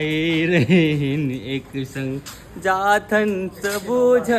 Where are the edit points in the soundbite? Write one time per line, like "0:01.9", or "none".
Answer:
none